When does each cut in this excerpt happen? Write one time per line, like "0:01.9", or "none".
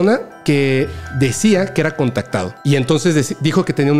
0:02.5